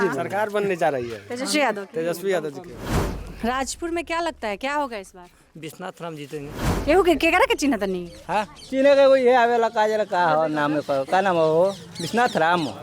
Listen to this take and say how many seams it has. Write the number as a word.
two